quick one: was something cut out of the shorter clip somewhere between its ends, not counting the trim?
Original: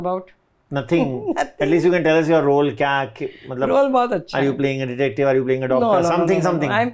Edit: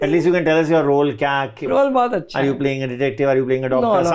yes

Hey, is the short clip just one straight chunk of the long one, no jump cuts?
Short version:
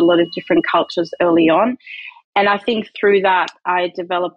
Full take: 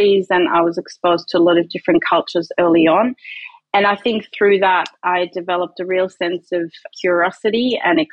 yes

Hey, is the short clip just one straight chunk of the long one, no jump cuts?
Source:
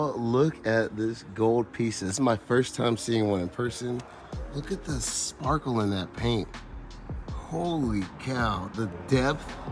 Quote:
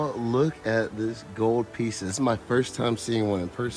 yes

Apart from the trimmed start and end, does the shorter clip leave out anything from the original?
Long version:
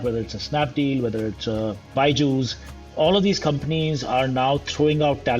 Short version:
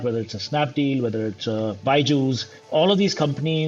yes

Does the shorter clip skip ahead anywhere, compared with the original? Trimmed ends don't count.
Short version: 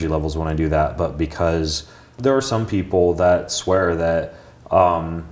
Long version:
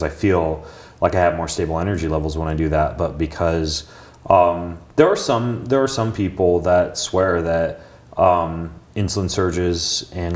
yes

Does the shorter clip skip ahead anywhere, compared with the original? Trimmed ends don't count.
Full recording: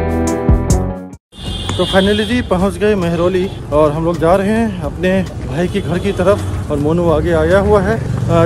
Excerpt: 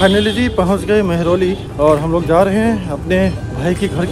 no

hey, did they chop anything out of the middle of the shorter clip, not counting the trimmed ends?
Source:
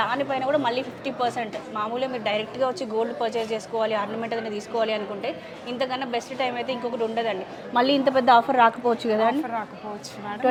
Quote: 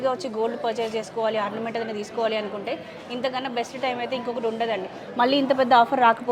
no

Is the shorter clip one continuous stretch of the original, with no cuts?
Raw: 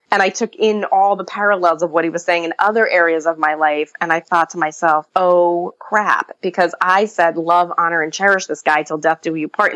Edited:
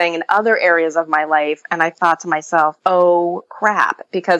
yes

